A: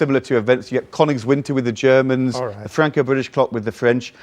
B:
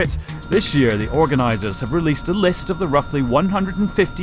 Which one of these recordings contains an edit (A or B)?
A